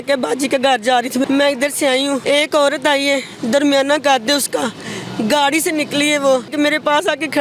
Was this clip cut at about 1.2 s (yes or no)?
yes